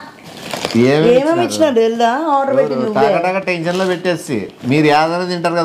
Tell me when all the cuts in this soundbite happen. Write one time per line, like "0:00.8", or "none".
none